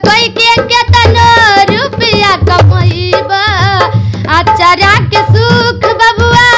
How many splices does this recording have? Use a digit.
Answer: 0